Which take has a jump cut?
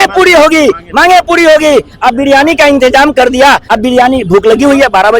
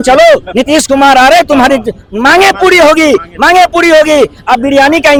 first; 1 cut; at 3.6 s

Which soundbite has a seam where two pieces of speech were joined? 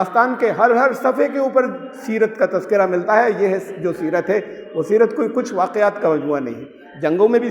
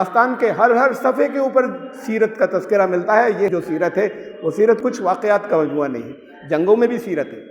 second; 2 cuts; at 3.5 s, 4.8 s

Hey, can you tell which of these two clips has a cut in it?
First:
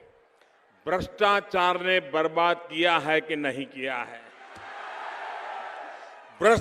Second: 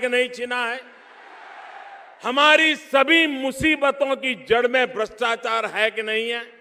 first; 1 cut; at 3.7 s

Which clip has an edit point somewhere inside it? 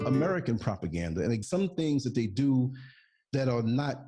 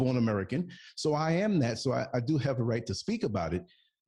first; 1 cut; at 1.4 s

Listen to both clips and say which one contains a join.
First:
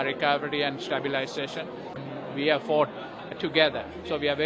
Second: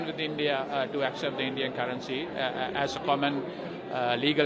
first; 1 cut; at 2.0 s

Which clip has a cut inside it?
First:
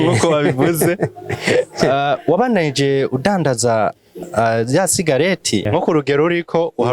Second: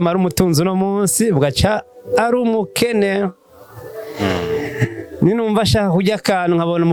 first; 1 cut; at 5.7 s

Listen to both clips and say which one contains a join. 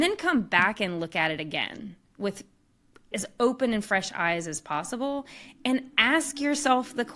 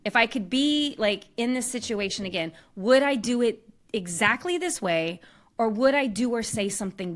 first; 1 cut; at 3.1 s

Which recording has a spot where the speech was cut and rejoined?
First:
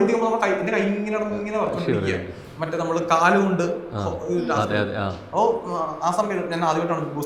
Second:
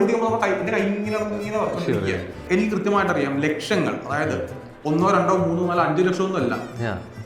second; 1 cut; at 2.4 s

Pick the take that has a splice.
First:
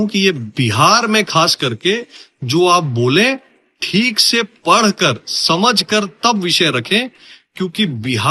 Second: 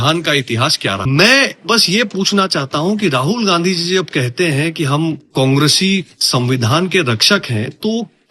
second; 1 cut; at 1.0 s

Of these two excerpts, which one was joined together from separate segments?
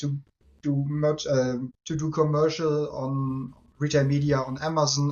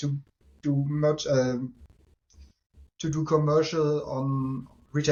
first; 1 cut; at 1.8 s

